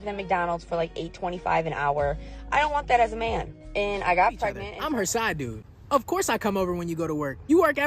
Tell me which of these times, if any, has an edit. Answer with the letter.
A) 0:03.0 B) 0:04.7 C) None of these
B